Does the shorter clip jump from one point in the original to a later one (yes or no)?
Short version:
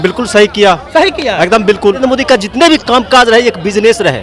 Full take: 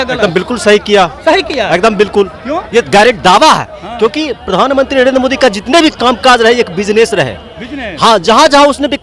yes